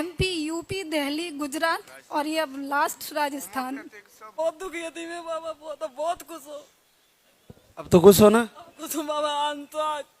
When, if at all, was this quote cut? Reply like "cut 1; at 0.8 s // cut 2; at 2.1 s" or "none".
cut 1; at 4.3 s

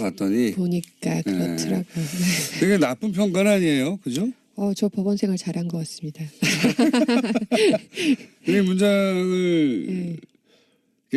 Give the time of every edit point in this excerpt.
cut 1; at 2.9 s

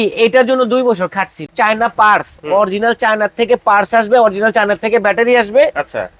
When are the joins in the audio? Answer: cut 1; at 1.4 s

